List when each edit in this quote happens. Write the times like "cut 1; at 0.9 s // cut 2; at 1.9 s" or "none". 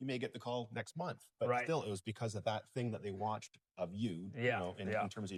none